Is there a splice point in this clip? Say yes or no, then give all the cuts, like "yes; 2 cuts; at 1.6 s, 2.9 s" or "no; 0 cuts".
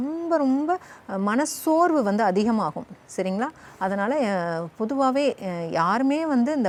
no; 0 cuts